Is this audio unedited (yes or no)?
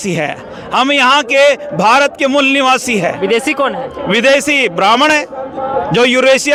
yes